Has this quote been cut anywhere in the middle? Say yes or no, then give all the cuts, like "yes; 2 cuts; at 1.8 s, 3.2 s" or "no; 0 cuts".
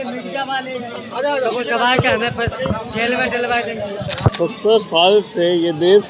yes; 1 cut; at 4.3 s